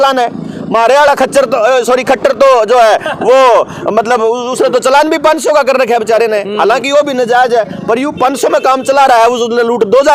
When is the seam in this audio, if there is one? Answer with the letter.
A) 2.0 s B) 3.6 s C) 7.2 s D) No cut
D